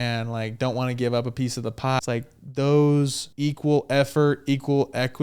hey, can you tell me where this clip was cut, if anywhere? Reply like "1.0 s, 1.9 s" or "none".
2.0 s, 3.2 s

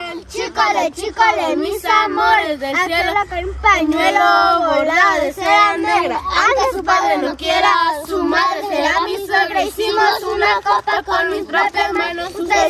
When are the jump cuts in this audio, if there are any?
none

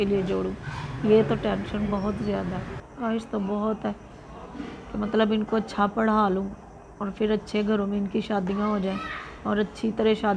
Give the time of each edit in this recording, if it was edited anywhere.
2.8 s

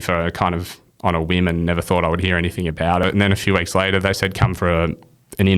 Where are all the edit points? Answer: 3.0 s

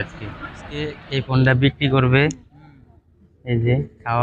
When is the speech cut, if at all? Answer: 1.0 s

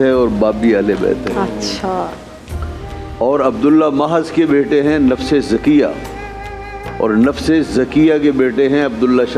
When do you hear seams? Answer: none

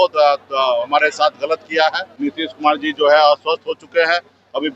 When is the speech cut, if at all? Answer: 2.1 s

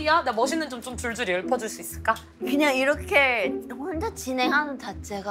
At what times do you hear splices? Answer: 2.3 s

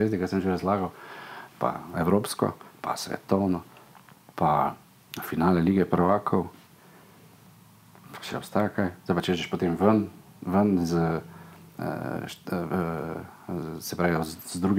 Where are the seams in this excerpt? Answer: none

